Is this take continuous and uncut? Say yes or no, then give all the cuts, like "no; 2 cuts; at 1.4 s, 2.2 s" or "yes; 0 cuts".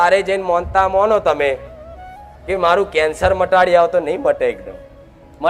yes; 0 cuts